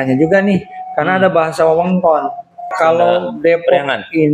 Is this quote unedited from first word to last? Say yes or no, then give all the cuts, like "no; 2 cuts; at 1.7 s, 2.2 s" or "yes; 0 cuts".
no; 1 cut; at 2.7 s